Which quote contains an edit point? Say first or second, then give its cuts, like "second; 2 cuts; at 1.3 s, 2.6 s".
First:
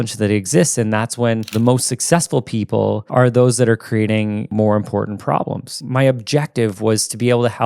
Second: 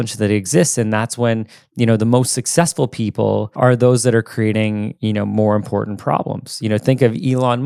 first; 3 cuts; at 1.5 s, 4.5 s, 5.8 s